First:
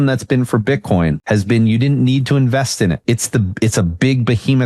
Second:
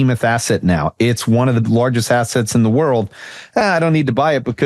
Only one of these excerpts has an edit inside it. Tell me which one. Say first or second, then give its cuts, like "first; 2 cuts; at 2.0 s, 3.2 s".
first; 2 cuts; at 1.2 s, 3.0 s